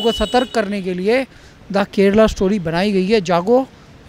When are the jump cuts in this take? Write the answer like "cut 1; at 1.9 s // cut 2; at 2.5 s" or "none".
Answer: none